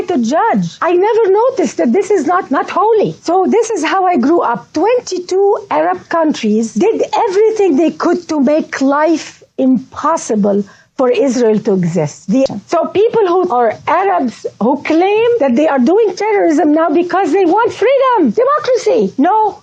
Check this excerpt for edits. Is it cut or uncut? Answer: cut